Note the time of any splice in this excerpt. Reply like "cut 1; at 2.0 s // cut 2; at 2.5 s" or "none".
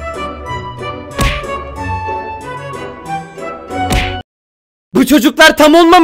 cut 1; at 4.3 s